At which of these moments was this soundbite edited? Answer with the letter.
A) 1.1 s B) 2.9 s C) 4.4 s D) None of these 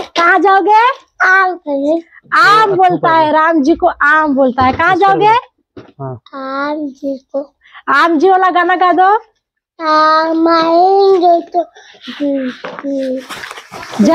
D